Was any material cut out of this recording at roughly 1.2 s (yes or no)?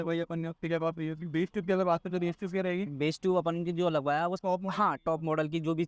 yes